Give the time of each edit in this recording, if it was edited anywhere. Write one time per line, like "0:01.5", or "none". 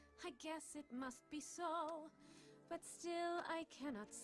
0:02.8